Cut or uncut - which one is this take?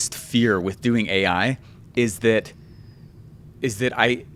uncut